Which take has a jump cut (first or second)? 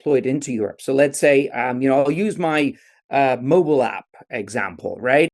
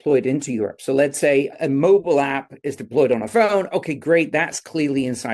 second